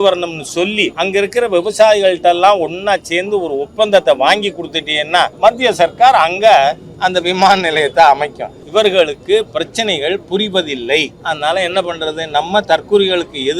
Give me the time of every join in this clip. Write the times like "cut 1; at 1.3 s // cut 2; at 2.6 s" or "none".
cut 1; at 0.9 s // cut 2; at 5.3 s // cut 3; at 8.5 s // cut 4; at 11.1 s